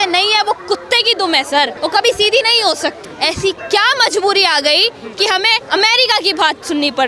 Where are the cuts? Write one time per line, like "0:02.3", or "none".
0:01.7
0:03.0
0:05.6